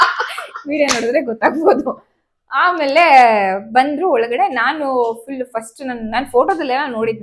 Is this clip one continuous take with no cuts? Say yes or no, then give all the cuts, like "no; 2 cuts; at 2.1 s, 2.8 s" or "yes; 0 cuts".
yes; 0 cuts